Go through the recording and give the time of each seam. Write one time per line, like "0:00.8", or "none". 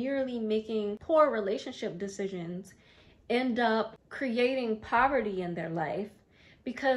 0:04.0